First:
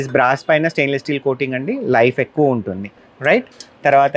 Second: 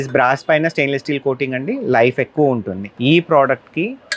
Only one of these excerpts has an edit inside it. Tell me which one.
second; 1 cut; at 2.8 s

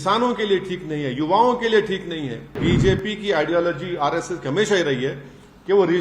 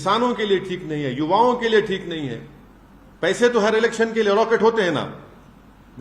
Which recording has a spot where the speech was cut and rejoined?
first; 1 cut; at 2.6 s

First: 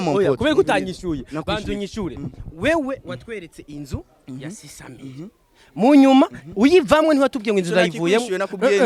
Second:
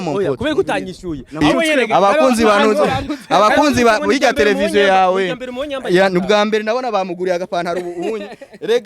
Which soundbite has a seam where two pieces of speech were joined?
second; 1 cut; at 1.4 s

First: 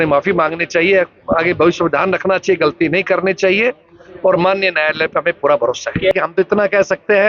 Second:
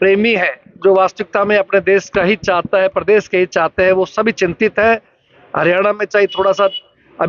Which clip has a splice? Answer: first; 1 cut; at 6.1 s

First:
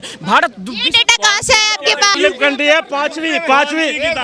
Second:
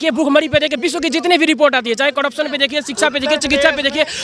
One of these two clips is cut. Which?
first; 1 cut; at 2.2 s

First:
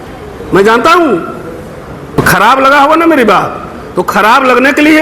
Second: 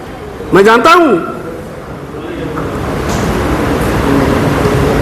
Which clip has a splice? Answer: first; 1 cut; at 2.2 s

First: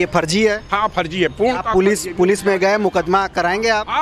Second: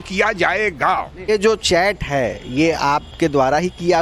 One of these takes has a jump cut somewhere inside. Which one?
second; 1 cut; at 1.3 s

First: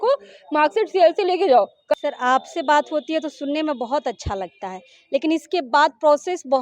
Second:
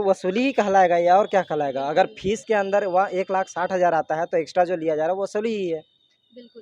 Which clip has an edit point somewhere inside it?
first; 1 cut; at 1.9 s

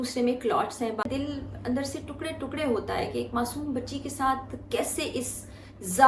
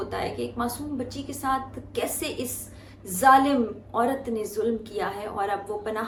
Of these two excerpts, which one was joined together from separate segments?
first; 1 cut; at 1.0 s

